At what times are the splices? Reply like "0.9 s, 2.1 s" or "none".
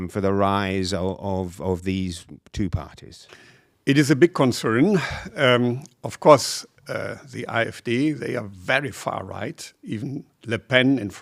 none